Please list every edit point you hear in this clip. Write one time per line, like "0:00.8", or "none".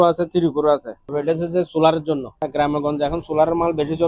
0:01.0
0:02.4